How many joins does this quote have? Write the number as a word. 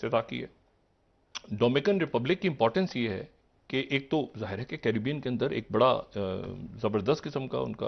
zero